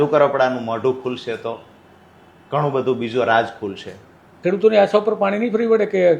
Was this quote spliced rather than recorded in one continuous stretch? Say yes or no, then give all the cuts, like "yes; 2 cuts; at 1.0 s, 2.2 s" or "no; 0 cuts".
yes; 1 cut; at 4.3 s